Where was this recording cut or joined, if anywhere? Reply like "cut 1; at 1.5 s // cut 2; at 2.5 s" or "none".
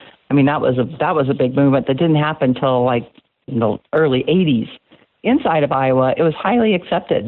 cut 1; at 5.1 s